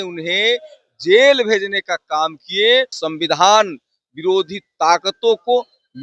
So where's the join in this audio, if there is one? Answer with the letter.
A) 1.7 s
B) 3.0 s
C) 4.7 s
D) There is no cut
B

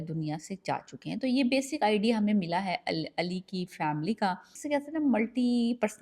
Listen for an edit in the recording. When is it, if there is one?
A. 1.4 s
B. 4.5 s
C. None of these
B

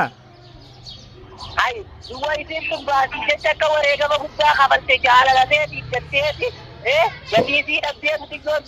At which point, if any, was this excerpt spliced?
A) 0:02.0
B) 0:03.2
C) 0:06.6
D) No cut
D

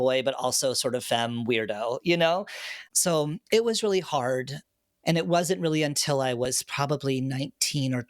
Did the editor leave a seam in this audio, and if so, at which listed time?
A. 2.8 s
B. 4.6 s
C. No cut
B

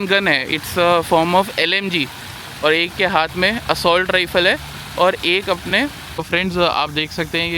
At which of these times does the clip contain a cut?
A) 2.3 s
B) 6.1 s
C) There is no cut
B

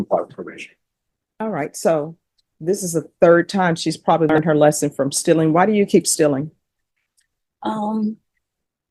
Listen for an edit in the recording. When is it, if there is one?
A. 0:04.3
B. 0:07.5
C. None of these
A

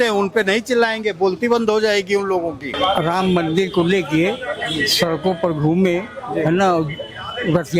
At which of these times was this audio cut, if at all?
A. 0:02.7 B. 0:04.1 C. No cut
A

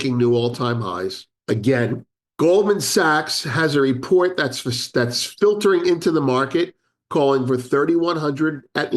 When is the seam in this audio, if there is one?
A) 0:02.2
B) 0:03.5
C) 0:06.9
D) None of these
A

